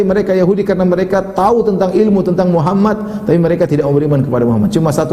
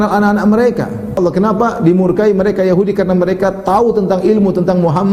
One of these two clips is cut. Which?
second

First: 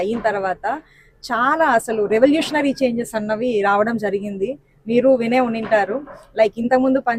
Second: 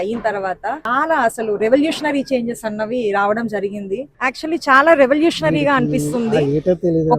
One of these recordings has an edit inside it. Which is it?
second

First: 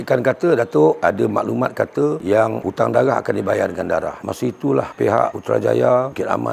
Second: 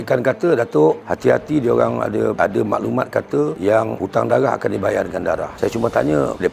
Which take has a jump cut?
first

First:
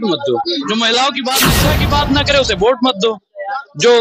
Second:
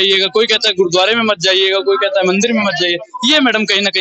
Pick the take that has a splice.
first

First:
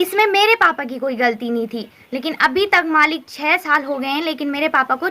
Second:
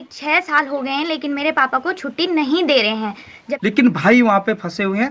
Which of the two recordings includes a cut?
second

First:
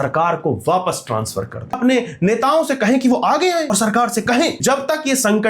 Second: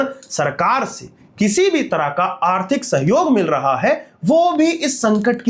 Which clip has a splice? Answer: first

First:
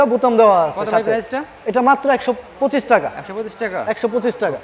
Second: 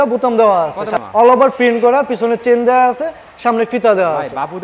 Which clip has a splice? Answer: second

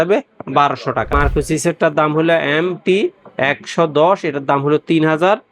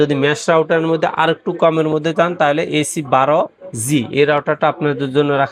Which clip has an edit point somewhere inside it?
first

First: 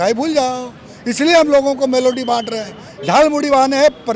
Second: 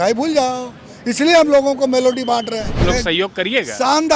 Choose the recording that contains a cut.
second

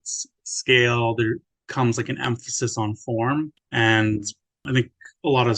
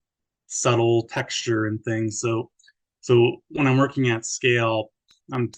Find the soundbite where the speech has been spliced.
first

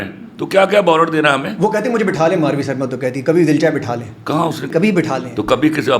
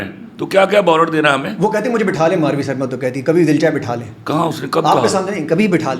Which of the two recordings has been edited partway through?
first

